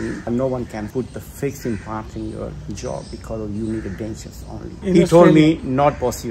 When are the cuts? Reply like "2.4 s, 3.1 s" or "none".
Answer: 4.7 s